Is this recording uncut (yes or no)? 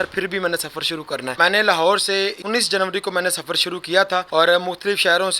no